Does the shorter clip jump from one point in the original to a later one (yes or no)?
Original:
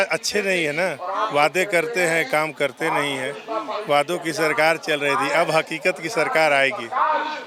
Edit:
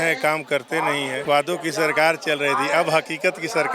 yes